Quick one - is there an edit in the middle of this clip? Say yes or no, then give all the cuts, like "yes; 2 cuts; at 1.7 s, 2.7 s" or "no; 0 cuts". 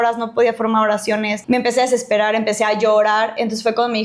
yes; 1 cut; at 1.4 s